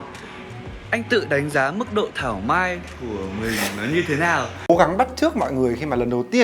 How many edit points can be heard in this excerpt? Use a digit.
1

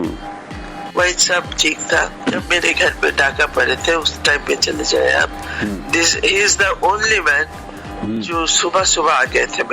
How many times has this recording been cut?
1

